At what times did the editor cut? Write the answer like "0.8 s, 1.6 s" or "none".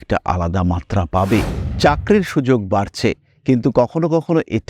1.6 s